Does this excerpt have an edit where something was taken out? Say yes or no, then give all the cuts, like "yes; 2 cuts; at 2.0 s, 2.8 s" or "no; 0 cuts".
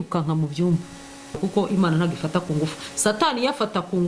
yes; 1 cut; at 1.4 s